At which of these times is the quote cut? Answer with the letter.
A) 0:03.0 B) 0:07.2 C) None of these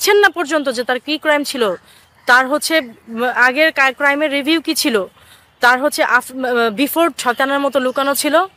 B